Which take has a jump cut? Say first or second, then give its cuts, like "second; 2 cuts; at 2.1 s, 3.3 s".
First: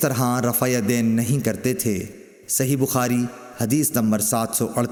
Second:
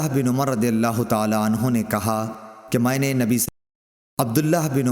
second; 1 cut; at 3.4 s